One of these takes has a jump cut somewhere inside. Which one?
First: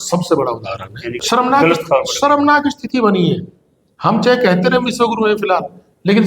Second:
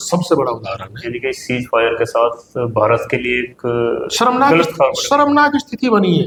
first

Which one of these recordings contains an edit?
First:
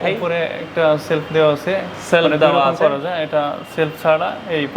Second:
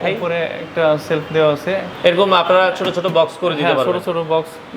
second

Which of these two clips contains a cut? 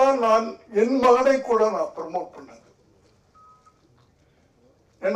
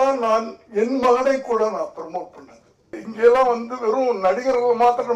second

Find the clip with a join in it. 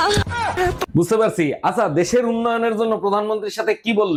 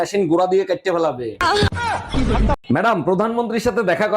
second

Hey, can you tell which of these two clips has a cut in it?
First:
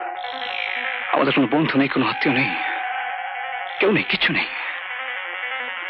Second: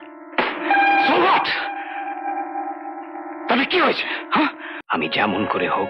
second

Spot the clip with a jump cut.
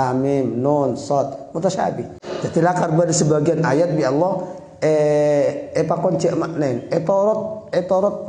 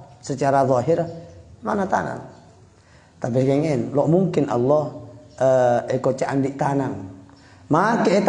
first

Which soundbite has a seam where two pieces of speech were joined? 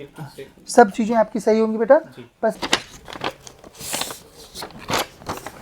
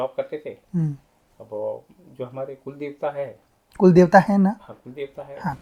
first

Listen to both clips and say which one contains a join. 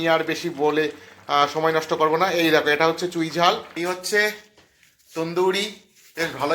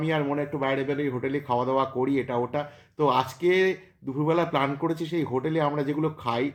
first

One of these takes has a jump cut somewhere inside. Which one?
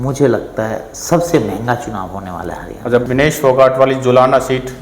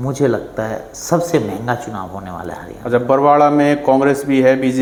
first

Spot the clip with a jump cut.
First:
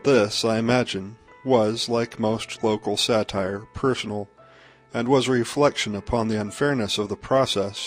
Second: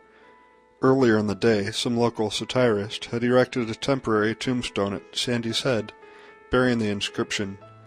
second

